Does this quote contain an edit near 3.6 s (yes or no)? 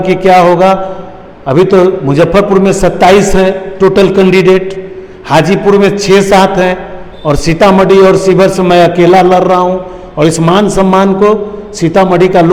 no